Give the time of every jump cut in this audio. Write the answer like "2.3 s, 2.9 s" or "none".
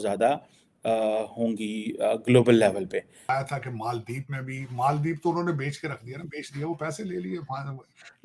3.2 s